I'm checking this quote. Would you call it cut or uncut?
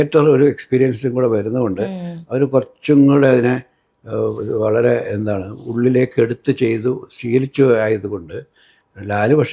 uncut